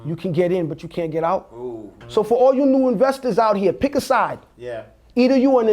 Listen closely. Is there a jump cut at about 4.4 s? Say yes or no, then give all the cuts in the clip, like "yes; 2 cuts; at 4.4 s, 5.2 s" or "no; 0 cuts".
no; 1 cut; at 1.9 s